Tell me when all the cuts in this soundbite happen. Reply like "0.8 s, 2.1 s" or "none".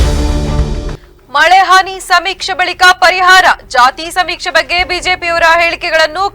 1.0 s